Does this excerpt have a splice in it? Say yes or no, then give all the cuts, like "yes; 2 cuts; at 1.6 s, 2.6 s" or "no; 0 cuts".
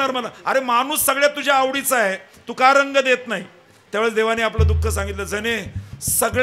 no; 0 cuts